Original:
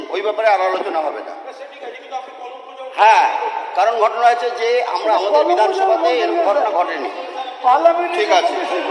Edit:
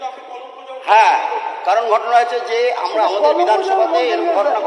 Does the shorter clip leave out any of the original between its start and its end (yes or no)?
no